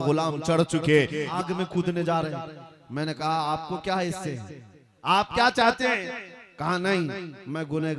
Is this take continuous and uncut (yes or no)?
no